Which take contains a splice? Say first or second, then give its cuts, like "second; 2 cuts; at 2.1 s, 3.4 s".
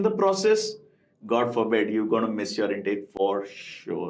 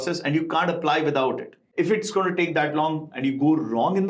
second; 1 cut; at 1.6 s